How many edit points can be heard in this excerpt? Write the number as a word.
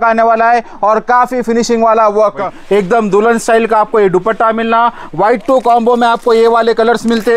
one